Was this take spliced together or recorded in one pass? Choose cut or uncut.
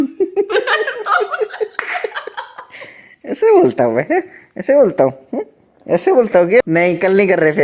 cut